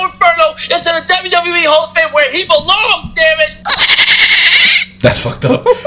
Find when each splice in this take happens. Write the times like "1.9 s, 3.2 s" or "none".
3.6 s